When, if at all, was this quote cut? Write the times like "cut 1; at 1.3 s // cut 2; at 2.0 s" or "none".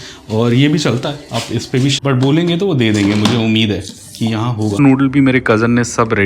cut 1; at 2.0 s // cut 2; at 4.8 s